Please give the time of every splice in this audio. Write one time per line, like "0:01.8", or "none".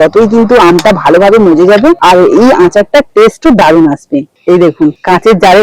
0:02.0
0:04.3